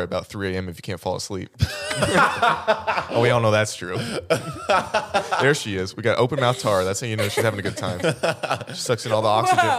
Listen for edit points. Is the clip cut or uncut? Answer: uncut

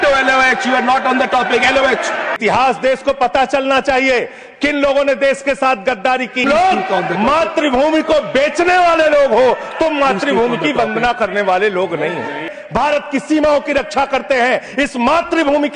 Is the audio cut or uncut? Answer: cut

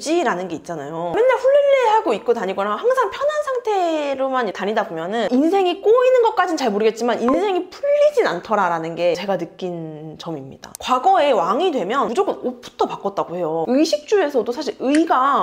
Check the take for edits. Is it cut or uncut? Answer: uncut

